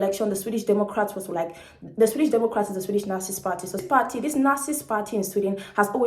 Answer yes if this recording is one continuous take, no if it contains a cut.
no